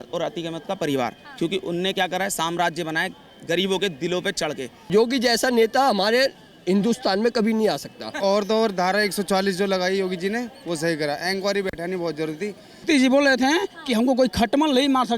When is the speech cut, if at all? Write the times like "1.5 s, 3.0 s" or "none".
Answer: 4.8 s, 8.1 s, 12.7 s